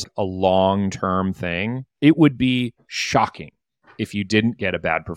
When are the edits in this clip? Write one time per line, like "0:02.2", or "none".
0:01.8